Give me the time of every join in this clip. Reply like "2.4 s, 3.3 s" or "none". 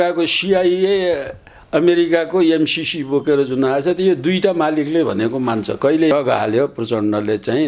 6.1 s